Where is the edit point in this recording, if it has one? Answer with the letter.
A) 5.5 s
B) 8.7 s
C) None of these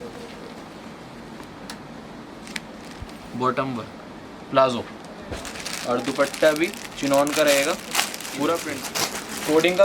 B